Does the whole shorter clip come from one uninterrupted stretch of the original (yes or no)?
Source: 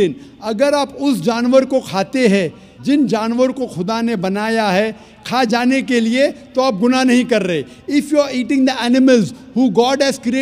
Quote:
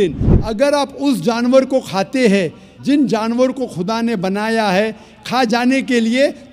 yes